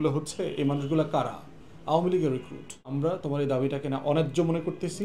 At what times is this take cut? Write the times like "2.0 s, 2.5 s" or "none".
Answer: 2.9 s

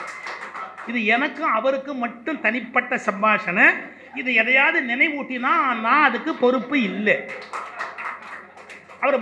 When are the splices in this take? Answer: none

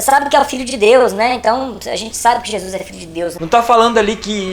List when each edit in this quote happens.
3.4 s

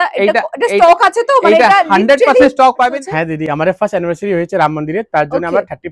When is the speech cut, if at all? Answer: 2.9 s

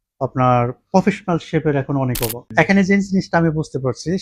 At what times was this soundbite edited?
2.4 s

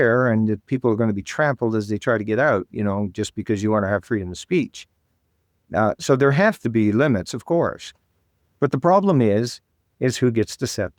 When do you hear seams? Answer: none

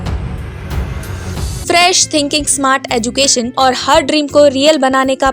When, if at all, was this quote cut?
1.5 s, 3.5 s

